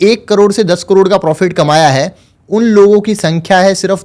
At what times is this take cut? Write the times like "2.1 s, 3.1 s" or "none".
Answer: none